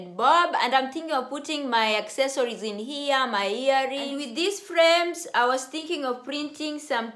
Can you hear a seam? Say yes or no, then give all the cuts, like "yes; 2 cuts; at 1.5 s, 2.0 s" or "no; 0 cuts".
yes; 1 cut; at 4.2 s